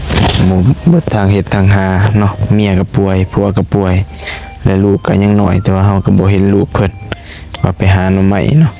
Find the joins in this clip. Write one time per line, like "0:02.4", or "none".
none